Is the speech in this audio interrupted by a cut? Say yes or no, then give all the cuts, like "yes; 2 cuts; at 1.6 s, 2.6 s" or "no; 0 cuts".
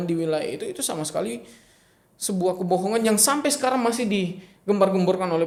no; 0 cuts